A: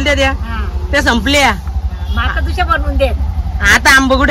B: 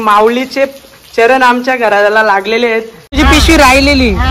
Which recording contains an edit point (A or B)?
B